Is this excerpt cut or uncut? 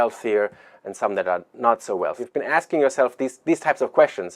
cut